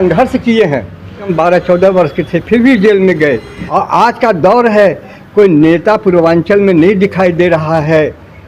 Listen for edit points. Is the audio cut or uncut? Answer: cut